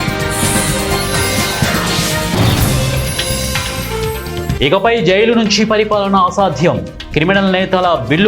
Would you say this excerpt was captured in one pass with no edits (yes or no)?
no